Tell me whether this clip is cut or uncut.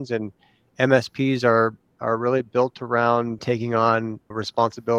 uncut